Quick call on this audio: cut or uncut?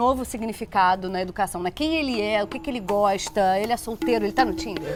uncut